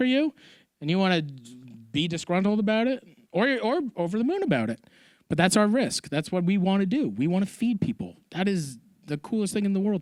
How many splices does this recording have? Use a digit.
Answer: 0